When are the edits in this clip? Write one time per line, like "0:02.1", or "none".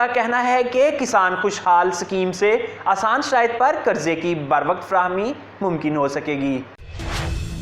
0:06.7